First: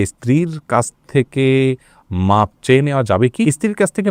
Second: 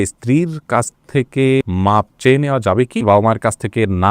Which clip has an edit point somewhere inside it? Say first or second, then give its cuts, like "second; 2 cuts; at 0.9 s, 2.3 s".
second; 2 cuts; at 1.6 s, 3.0 s